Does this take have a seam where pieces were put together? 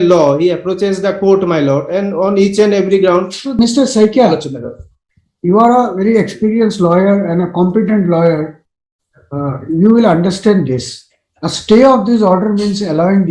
yes; 1 cut; at 3.6 s

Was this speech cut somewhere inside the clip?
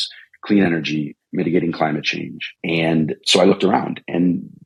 no; 0 cuts

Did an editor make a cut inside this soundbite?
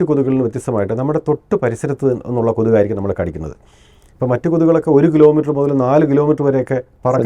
no; 0 cuts

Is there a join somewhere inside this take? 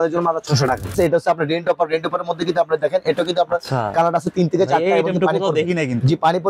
yes; 1 cut; at 0.9 s

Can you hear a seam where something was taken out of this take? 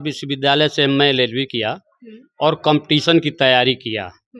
no; 0 cuts

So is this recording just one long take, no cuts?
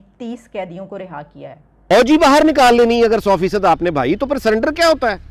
no; 1 cut; at 1.8 s

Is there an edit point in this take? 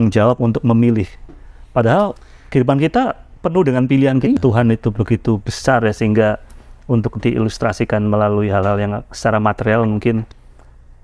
yes; 1 cut; at 4.4 s

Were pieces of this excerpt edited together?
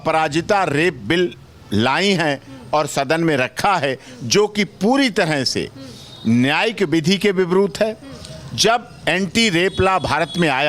no; 0 cuts

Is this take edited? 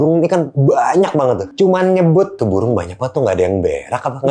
yes; 2 cuts; at 1.5 s, 2.4 s

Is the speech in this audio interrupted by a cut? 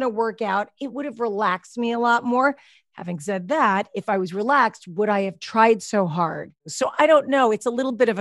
yes; 1 cut; at 6.6 s

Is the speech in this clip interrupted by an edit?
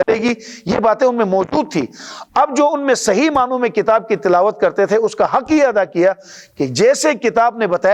no; 0 cuts

